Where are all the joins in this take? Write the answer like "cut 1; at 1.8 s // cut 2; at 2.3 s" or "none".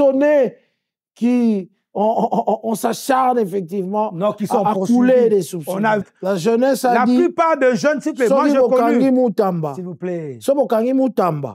cut 1; at 6.0 s